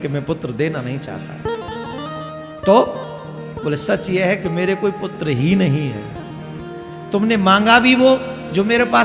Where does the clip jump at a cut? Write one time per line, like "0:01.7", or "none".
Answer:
none